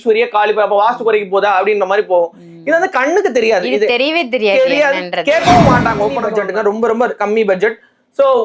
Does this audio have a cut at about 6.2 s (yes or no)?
yes